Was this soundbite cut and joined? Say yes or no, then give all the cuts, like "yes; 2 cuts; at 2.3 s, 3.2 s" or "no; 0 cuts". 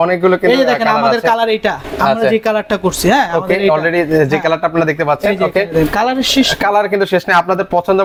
no; 0 cuts